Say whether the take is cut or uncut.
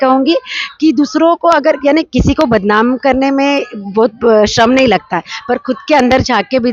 uncut